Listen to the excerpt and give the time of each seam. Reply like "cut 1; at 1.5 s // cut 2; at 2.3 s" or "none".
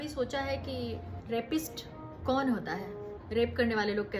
cut 1; at 1.1 s // cut 2; at 2.1 s // cut 3; at 3.1 s